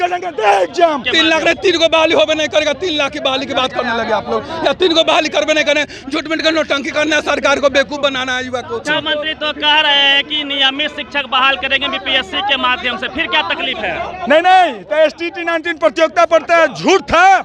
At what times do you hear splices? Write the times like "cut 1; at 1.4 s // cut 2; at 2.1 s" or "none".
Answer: cut 1; at 1.1 s // cut 2; at 8.9 s